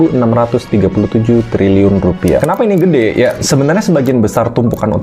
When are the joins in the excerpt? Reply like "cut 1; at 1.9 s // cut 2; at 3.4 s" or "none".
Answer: cut 1; at 2.4 s